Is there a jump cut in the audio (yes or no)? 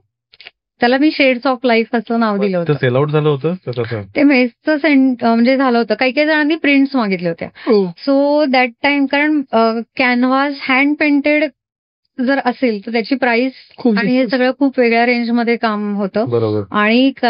no